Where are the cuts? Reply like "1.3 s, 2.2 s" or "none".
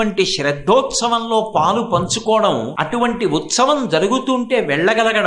2.7 s

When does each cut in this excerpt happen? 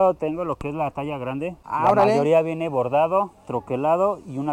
1.6 s

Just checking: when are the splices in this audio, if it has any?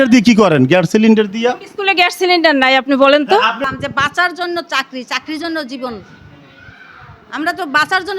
3.6 s

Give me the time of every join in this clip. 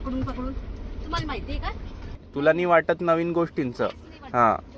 2.2 s

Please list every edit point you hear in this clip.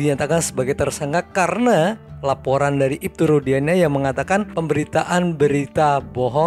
none

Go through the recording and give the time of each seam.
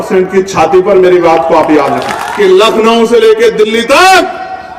2.2 s

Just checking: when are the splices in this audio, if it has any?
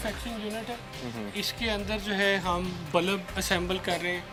none

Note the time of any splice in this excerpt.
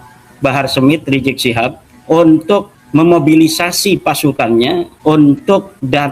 1.9 s, 2.8 s, 4.9 s

